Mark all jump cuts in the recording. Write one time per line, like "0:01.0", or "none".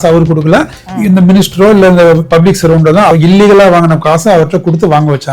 0:03.1